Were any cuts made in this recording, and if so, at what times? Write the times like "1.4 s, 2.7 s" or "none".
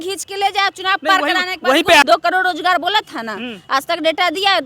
2.0 s

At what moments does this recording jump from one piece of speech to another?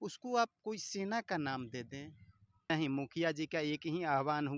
2.7 s

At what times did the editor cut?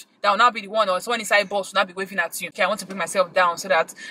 2.4 s

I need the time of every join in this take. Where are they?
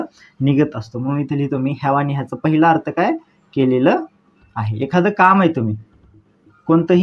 none

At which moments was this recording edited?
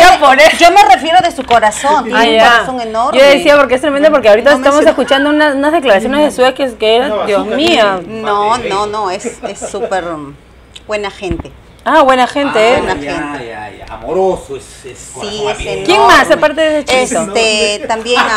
none

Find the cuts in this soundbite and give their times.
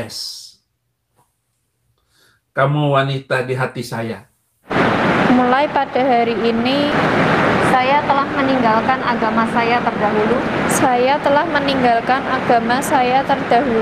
4.7 s

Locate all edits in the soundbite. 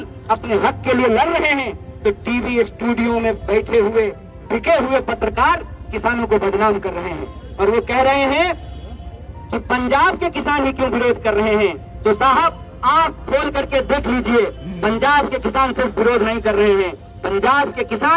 none

